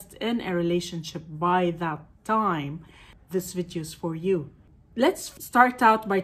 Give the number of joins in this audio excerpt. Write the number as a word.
one